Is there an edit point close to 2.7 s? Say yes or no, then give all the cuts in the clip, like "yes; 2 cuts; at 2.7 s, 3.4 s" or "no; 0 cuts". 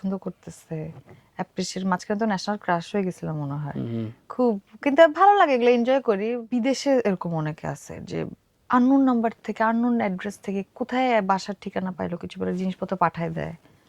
no; 1 cut; at 6.4 s